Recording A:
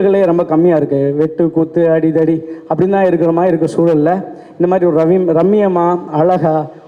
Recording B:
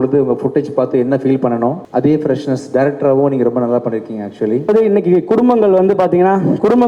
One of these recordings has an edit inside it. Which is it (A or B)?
B